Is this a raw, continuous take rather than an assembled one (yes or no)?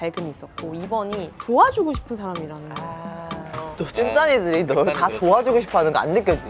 yes